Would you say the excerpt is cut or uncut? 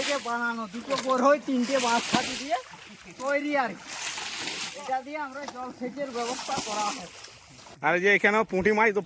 uncut